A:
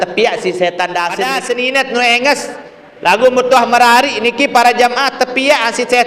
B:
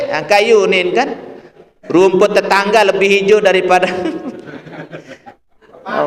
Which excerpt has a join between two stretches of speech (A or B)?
A